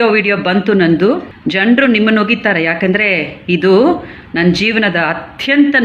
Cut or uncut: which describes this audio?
cut